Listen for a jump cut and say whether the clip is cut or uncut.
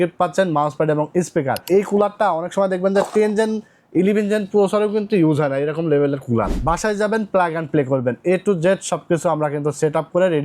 cut